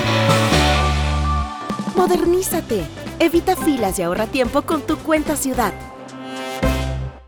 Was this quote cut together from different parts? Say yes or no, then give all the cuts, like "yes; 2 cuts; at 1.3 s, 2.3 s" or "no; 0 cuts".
no; 0 cuts